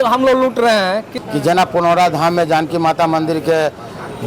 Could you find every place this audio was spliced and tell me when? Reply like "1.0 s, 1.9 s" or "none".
1.1 s